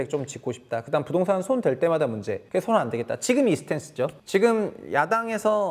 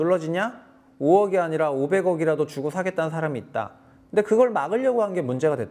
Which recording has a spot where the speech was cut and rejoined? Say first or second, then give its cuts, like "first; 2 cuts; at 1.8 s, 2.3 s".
first; 2 cuts; at 2.3 s, 4.2 s